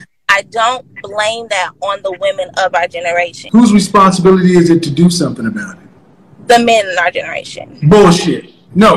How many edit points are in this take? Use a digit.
1